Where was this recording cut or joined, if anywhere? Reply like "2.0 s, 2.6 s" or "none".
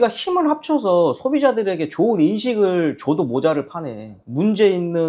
4.1 s